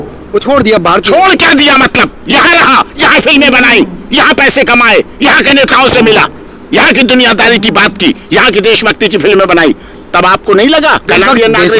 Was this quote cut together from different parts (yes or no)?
no